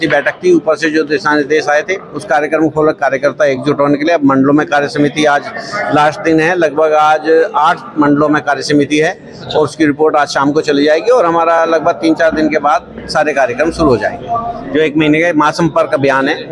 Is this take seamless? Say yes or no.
yes